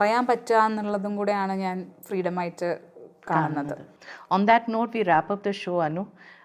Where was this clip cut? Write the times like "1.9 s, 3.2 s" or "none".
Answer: none